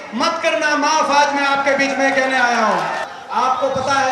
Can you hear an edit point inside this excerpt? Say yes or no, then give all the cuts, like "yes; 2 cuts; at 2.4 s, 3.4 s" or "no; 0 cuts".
yes; 1 cut; at 3.0 s